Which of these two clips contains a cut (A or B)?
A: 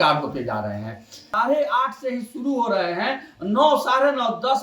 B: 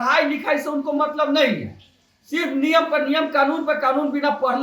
A